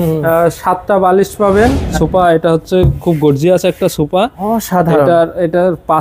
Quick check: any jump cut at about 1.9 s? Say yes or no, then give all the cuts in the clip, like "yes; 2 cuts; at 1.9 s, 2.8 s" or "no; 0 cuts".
yes; 1 cut; at 1.9 s